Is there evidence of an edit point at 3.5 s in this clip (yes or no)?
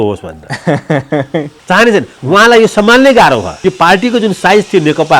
yes